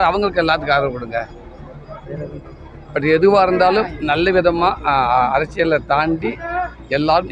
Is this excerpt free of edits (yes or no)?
no